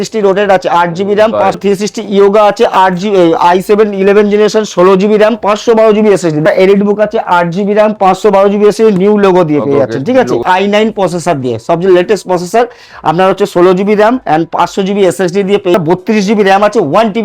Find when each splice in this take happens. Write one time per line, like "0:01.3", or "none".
0:01.6
0:06.4
0:10.4
0:15.7